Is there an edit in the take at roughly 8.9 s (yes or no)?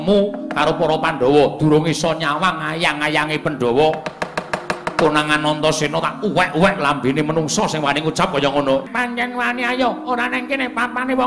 yes